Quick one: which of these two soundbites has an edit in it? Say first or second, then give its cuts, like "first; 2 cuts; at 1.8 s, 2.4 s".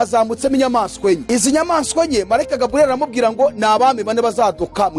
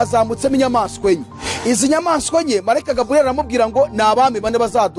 first; 1 cut; at 1.2 s